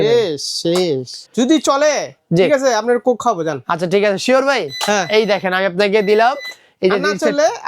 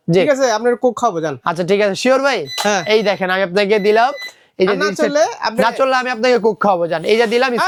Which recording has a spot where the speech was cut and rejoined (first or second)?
first